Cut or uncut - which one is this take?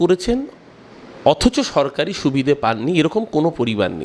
uncut